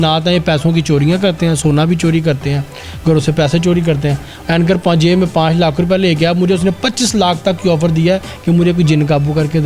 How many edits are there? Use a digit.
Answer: 0